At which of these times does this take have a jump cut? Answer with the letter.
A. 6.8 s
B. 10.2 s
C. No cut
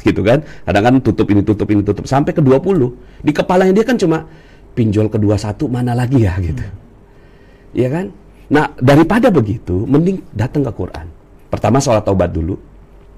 C